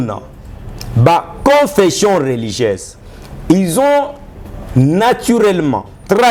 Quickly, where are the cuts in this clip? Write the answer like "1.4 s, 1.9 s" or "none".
none